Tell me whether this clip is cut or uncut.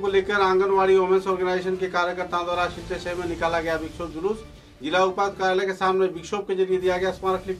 uncut